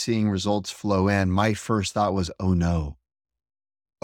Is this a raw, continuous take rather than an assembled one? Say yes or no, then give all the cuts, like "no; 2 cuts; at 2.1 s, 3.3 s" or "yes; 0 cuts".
yes; 0 cuts